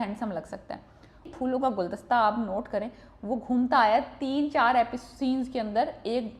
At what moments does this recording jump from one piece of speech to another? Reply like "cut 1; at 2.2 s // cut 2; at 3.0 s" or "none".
cut 1; at 1.3 s